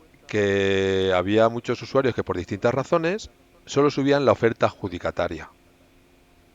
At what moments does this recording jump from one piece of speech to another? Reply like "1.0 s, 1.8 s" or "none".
none